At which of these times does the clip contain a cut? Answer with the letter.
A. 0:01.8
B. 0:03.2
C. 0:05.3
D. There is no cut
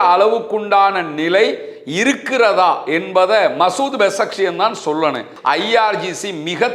C